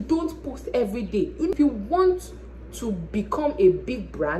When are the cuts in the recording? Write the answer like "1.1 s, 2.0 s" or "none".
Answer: 1.5 s